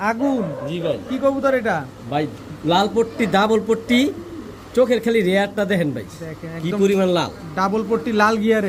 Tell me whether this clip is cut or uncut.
uncut